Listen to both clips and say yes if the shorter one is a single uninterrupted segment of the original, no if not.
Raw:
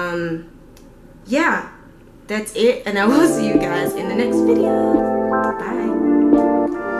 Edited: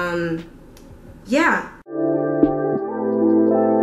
no